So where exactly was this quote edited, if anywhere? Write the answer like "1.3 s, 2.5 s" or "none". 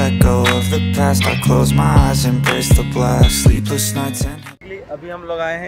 4.4 s